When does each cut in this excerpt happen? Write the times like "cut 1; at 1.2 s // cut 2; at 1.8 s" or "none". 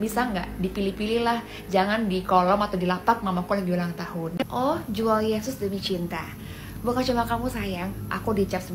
cut 1; at 4.4 s